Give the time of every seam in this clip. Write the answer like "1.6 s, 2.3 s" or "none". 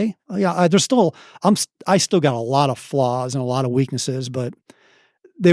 none